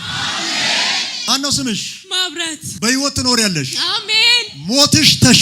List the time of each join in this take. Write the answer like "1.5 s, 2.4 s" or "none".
1.1 s